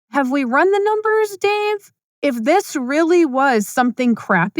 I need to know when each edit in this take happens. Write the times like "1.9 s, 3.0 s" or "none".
1.9 s